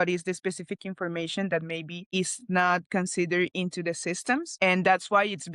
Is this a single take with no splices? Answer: yes; 0 cuts

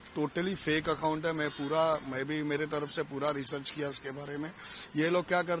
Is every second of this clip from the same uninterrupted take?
yes; 0 cuts

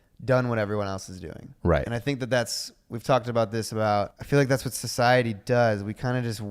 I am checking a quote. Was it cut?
yes; 1 cut; at 4.2 s

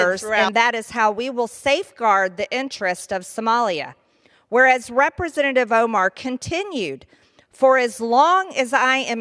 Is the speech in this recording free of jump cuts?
yes; 0 cuts

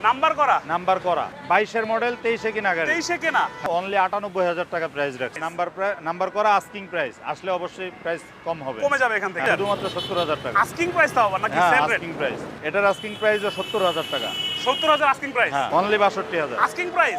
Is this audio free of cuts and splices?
no; 6 cuts; at 1.4 s, 3.7 s, 5.4 s, 9.4 s, 12.4 s, 15.7 s

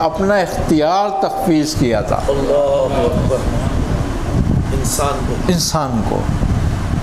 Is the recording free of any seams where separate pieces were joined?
yes; 0 cuts

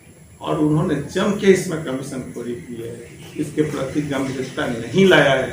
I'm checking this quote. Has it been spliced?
no; 0 cuts

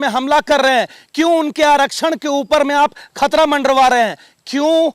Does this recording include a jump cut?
no; 0 cuts

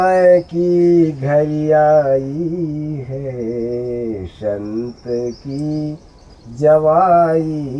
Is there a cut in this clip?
no; 0 cuts

